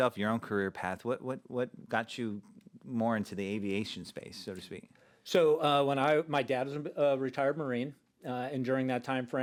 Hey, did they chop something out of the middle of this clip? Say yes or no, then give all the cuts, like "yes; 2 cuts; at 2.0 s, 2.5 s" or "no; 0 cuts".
no; 0 cuts